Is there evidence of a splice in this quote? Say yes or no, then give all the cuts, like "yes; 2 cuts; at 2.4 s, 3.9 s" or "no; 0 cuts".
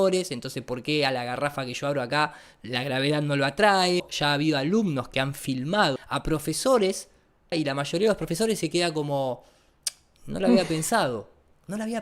yes; 3 cuts; at 4.1 s, 6.0 s, 7.5 s